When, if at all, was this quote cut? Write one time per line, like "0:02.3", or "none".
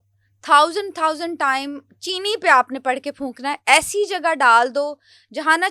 none